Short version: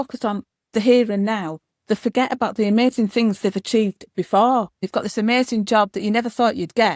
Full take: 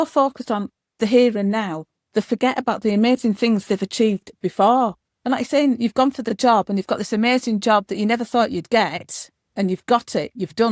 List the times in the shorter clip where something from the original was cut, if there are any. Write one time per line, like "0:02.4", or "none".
0:04.8